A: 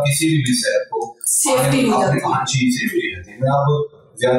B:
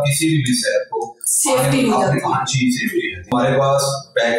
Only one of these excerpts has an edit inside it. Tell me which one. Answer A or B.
B